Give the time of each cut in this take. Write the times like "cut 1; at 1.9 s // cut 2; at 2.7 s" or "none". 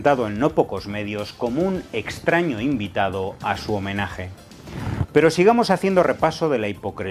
cut 1; at 1.3 s